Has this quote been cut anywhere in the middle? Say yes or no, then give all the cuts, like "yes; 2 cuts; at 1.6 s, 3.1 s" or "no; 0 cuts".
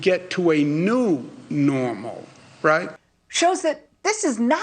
yes; 1 cut; at 2.9 s